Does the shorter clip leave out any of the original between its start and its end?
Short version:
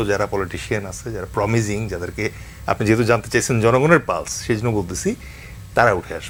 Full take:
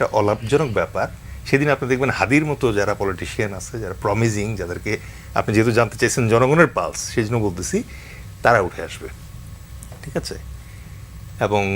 no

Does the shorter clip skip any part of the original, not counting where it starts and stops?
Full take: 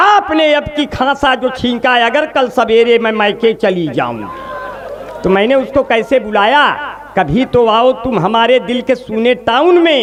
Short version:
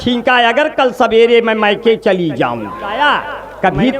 yes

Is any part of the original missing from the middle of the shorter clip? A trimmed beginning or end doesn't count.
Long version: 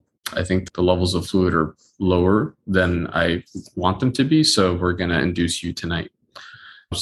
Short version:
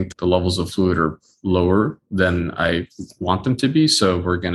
no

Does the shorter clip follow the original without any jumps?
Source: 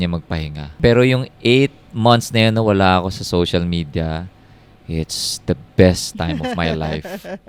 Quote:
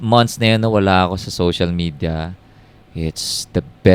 yes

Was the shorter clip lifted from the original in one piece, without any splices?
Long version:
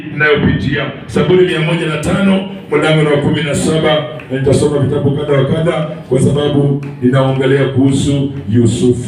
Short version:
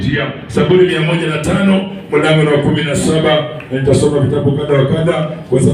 yes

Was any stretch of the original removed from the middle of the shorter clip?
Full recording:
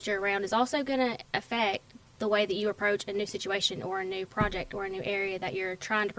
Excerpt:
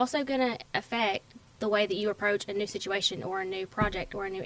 no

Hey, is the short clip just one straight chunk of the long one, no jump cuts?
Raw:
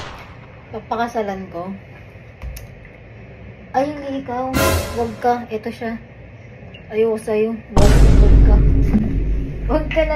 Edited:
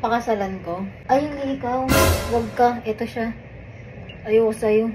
no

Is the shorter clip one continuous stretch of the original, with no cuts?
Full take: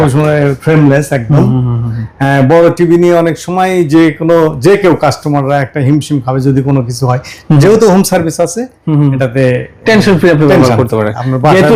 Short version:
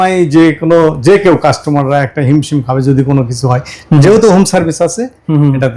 yes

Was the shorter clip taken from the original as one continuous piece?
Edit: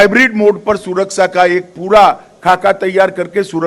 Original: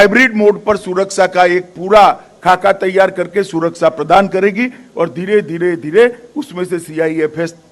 yes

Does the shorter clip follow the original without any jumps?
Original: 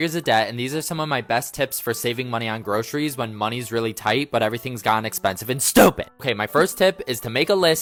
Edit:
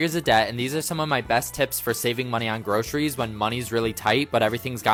yes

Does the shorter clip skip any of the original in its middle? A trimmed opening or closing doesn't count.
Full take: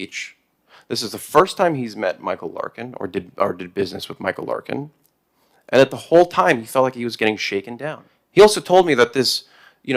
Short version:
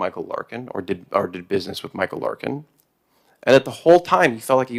no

